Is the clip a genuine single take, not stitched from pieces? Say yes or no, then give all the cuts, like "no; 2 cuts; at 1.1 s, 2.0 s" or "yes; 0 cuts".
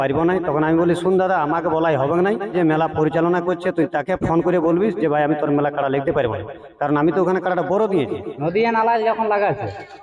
no; 2 cuts; at 2.5 s, 8.3 s